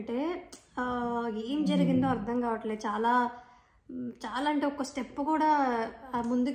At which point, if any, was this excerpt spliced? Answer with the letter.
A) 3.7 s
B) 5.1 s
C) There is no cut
C